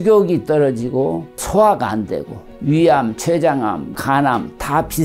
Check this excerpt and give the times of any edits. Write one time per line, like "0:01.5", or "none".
0:01.4
0:02.5
0:03.9